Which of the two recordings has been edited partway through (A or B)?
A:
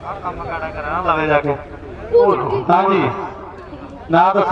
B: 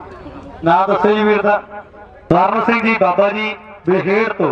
B